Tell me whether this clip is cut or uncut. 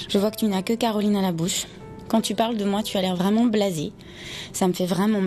uncut